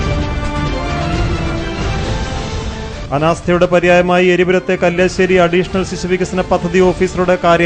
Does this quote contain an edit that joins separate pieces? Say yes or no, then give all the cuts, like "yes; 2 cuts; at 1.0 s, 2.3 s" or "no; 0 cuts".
no; 0 cuts